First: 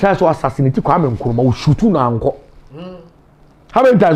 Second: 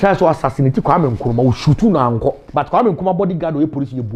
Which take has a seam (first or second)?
second